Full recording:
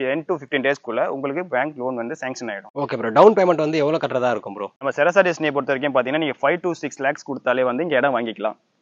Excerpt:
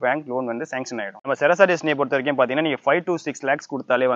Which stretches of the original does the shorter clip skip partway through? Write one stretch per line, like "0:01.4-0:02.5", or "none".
0:02.6-0:04.7